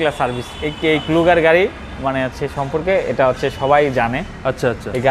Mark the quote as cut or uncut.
uncut